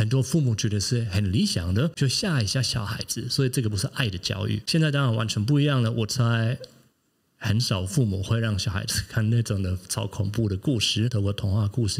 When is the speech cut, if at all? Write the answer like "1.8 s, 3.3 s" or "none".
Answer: 1.9 s, 4.6 s, 11.1 s